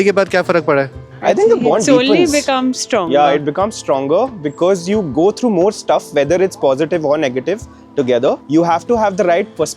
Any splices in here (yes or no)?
yes